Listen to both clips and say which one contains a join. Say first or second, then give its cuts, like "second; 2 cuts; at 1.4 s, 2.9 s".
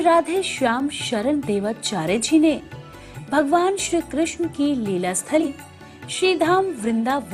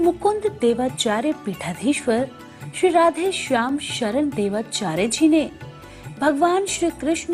first; 1 cut; at 5.4 s